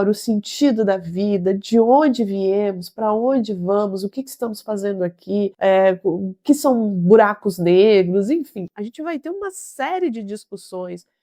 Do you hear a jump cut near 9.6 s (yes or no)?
no